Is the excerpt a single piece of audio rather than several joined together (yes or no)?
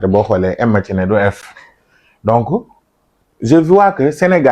yes